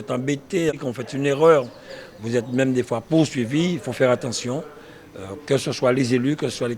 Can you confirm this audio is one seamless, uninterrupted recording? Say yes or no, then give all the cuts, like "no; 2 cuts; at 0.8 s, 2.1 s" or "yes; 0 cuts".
yes; 0 cuts